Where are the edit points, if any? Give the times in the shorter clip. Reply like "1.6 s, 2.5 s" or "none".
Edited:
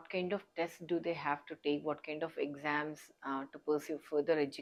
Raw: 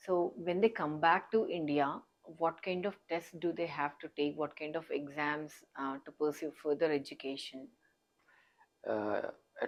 none